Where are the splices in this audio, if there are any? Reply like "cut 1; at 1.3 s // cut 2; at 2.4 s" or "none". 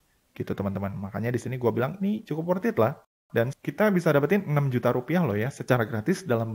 cut 1; at 3.1 s